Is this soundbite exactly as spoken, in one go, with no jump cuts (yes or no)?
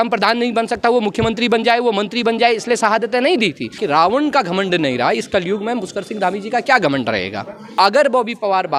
no